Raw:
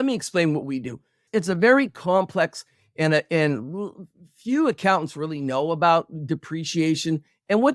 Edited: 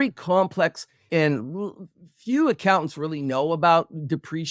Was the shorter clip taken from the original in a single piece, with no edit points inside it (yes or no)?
no